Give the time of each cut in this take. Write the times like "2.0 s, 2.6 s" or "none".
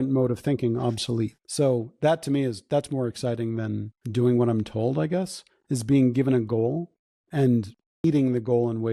8.0 s

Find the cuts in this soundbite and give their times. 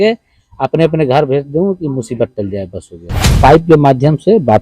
3.3 s

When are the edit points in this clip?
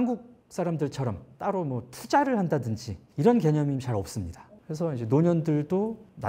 4.5 s

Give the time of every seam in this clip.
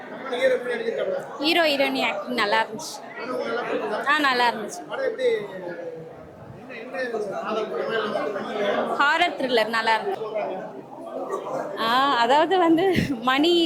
10.1 s

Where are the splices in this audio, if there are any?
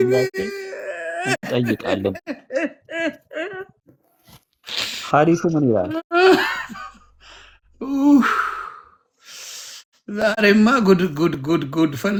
none

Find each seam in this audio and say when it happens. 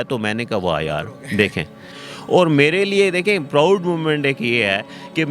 1.9 s

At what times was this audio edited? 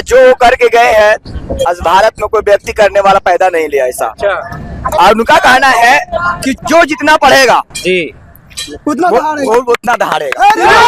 6.6 s

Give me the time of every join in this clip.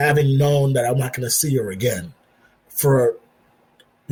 none

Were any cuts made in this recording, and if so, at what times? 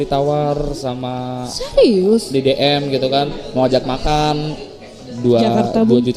none

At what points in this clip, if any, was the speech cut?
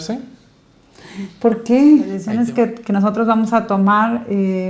2.3 s

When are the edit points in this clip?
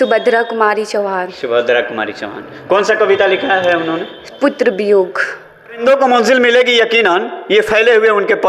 5.8 s

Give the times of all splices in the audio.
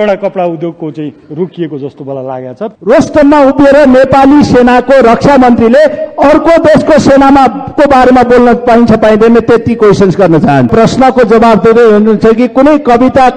2.7 s, 10.7 s

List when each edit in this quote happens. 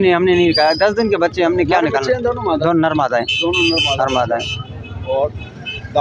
none

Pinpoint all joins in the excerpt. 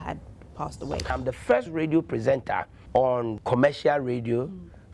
1.1 s

